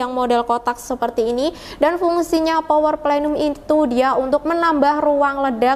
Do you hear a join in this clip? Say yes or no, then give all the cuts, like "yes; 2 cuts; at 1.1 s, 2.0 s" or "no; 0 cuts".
no; 0 cuts